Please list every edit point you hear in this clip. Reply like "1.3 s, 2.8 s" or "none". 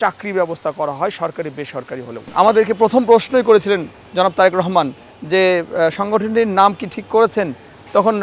2.3 s